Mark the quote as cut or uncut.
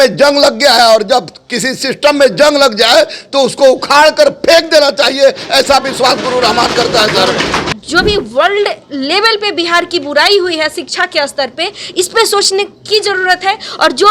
cut